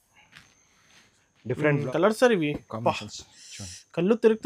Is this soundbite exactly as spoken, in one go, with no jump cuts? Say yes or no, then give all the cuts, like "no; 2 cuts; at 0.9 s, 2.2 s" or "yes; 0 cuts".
no; 1 cut; at 1.9 s